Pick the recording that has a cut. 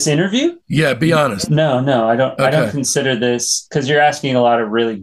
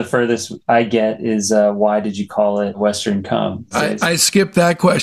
second; 1 cut; at 3.9 s

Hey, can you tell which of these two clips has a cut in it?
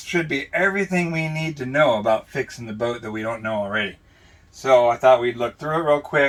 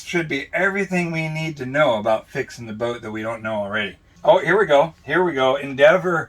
second; 1 cut; at 4.0 s

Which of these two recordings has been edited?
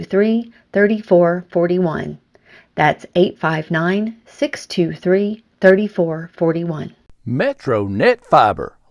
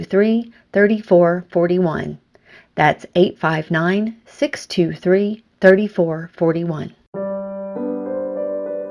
first; 1 cut; at 7.0 s

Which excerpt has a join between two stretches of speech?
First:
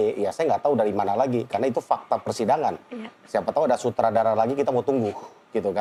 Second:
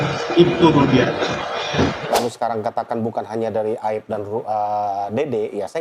second; 1 cut; at 2.0 s

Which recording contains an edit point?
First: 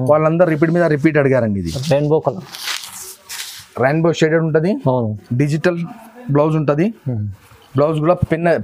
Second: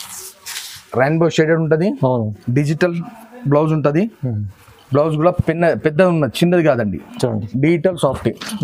second; 1 cut; at 7.5 s

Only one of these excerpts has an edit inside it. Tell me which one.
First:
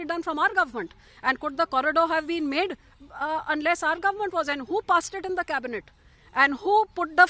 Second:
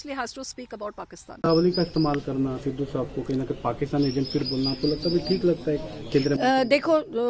second; 1 cut; at 1.5 s

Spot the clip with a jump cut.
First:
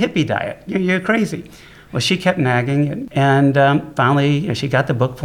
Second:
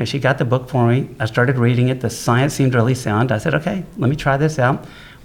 first; 1 cut; at 3.0 s

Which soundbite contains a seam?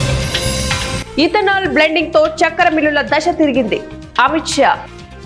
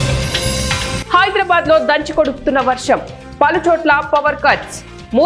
second; 1 cut; at 1.0 s

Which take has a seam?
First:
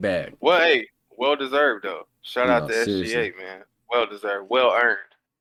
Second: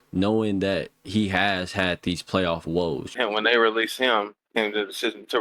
second; 1 cut; at 3.1 s

